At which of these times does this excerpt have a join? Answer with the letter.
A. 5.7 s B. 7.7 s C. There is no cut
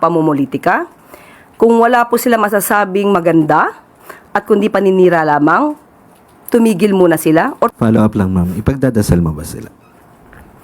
B